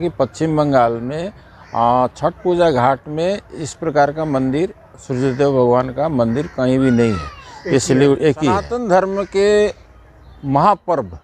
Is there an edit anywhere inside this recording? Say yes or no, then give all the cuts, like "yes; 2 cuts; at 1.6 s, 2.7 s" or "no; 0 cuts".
yes; 1 cut; at 8.7 s